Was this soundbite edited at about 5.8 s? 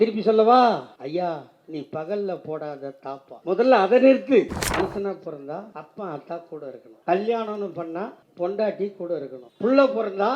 yes; 7 cuts; at 1.0 s, 3.3 s, 4.6 s, 5.8 s, 6.9 s, 8.2 s, 9.4 s

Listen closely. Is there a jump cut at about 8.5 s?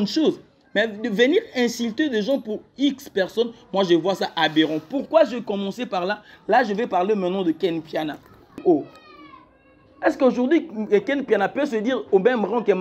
yes; 1 cut; at 8.5 s

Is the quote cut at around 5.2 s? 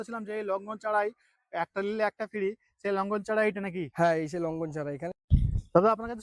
yes; 1 cut; at 5.2 s

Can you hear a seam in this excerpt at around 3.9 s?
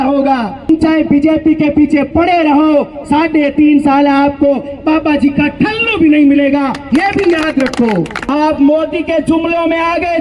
no; 2 cuts; at 0.7 s, 8.2 s

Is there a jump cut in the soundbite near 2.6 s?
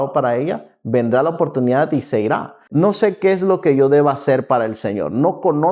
yes; 1 cut; at 2.6 s

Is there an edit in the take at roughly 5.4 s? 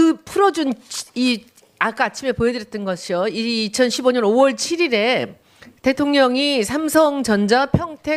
yes; 1 cut; at 5.4 s

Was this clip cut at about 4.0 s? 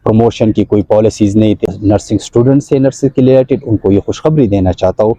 no; 1 cut; at 1.7 s

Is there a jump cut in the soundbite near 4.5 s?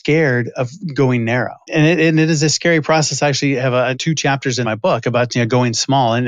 yes; 2 cuts; at 1.7 s, 4.5 s

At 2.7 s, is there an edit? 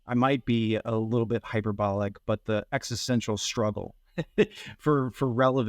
no; 0 cuts

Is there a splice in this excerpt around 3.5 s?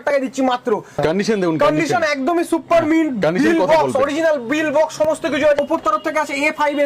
no; 2 cuts; at 1.0 s, 5.6 s

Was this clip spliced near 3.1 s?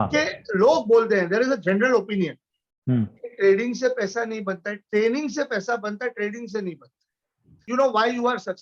no; 1 cut; at 7.6 s

